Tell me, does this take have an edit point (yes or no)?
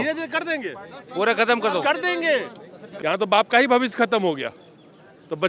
yes